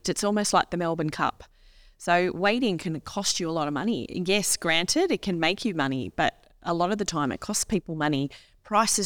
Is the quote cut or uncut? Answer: uncut